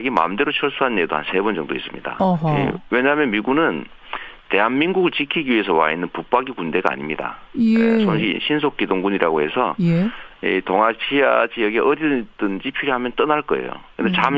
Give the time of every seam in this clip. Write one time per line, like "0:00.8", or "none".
none